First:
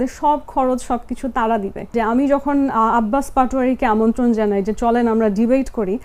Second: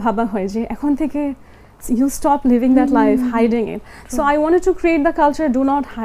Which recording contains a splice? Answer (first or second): first